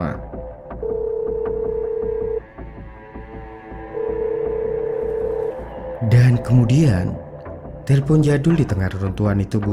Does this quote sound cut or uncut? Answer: uncut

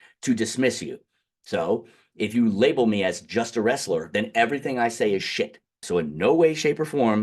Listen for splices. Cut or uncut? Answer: cut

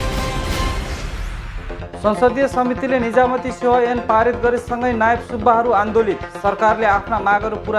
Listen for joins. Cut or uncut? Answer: cut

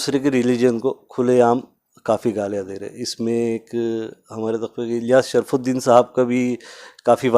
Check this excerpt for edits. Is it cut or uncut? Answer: uncut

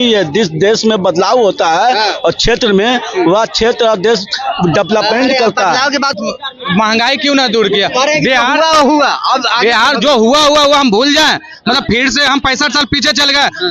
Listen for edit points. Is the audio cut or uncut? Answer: cut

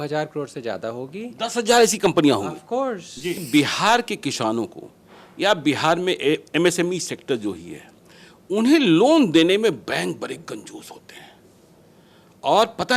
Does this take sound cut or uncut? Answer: cut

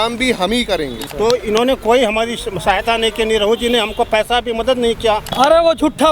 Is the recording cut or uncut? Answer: cut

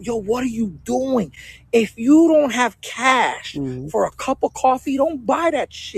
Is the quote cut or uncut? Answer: uncut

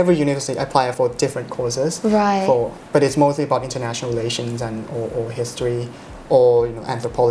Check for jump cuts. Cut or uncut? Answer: cut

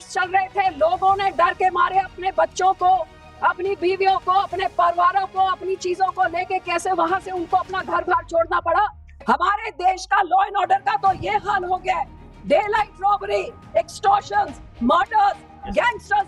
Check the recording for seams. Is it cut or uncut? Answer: cut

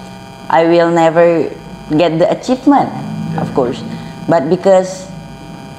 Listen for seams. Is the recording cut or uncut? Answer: uncut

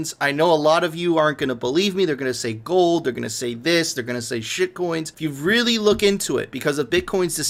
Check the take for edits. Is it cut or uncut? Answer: uncut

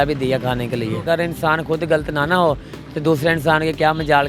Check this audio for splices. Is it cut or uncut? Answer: cut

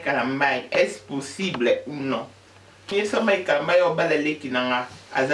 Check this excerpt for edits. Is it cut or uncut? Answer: cut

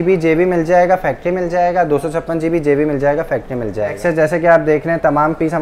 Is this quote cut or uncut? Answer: cut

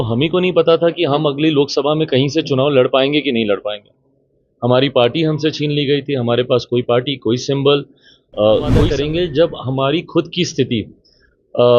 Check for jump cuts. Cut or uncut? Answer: cut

